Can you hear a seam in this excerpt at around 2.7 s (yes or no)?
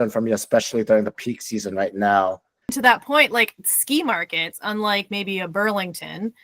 yes